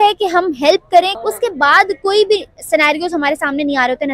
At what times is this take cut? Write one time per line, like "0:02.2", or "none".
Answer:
0:01.1